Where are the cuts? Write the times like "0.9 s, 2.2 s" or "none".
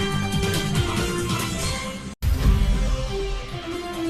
2.2 s